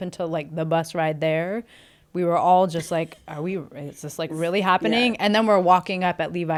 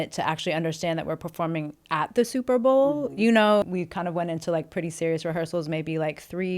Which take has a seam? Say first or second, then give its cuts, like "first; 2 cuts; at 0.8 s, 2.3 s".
second; 1 cut; at 3.6 s